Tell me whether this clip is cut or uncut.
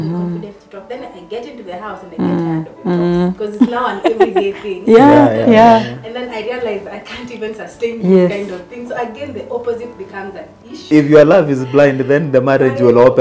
cut